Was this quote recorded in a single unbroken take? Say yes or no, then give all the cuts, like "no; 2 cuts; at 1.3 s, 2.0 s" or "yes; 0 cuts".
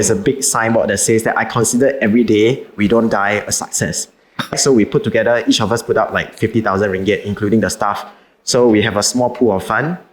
no; 1 cut; at 4.5 s